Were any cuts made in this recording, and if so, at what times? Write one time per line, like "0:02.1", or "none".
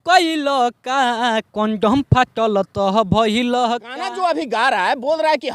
0:03.9